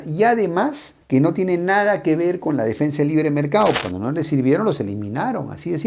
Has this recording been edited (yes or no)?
yes